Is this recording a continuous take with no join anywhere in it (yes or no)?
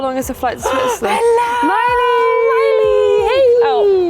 yes